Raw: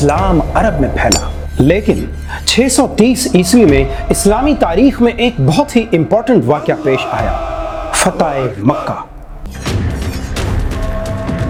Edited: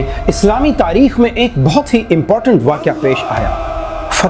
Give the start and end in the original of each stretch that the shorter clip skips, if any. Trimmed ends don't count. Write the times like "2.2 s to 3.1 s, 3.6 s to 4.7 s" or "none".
none